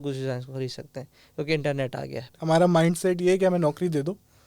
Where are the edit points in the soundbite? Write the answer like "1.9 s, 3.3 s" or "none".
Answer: 2.3 s

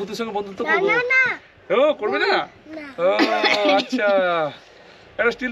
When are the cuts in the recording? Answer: none

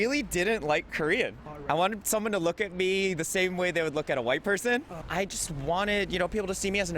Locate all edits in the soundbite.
1.5 s, 5.0 s

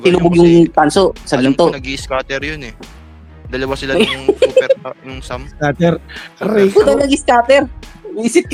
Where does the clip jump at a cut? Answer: none

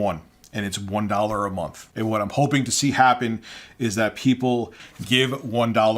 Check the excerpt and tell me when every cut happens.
4.8 s

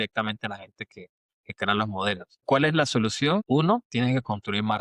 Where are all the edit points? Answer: 3.4 s

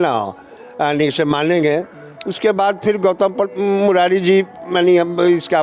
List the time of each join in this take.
none

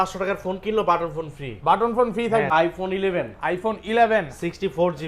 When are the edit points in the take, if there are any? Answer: 2.5 s

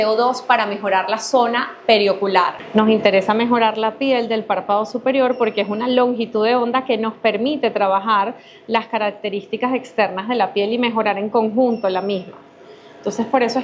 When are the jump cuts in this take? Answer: 2.6 s

